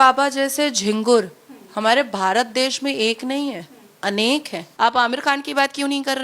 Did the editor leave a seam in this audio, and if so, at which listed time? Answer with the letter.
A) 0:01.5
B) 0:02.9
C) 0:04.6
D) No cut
C